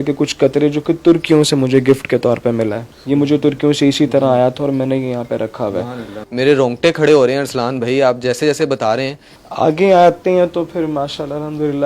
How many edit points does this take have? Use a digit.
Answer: 0